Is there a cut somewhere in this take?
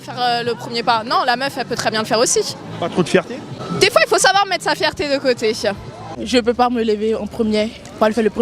yes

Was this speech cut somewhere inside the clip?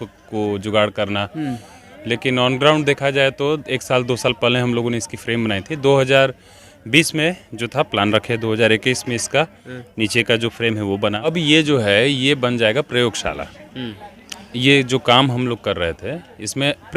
yes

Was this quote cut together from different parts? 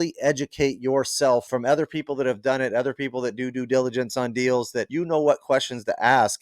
yes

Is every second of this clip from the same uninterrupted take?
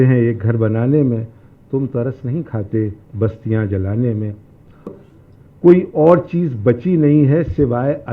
no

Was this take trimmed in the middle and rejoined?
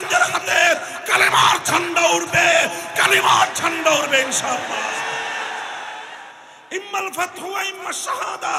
yes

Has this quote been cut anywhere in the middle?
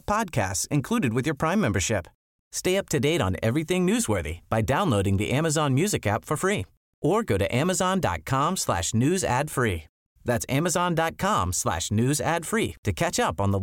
no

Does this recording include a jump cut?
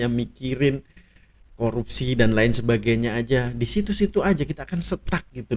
no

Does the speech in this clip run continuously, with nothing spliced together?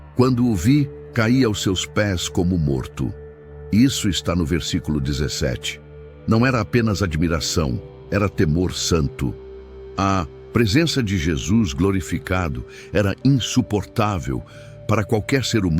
no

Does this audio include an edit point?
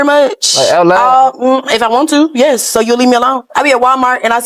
no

